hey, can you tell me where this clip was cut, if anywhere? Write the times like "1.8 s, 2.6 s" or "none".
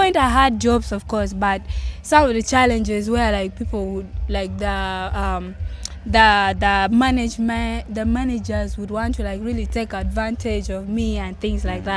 none